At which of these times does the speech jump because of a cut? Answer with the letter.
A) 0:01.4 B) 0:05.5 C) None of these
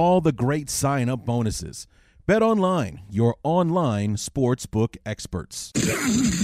B